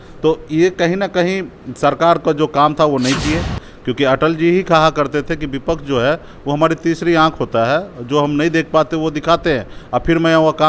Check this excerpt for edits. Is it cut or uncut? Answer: cut